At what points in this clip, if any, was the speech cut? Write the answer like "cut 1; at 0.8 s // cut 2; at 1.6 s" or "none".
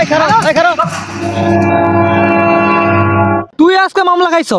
none